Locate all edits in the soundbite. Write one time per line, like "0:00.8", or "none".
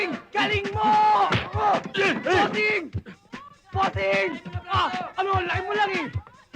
none